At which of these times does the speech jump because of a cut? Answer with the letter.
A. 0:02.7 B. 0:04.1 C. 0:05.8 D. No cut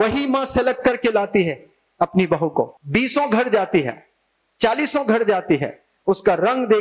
A